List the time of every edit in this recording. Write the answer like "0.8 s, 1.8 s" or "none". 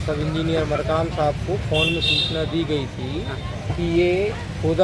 none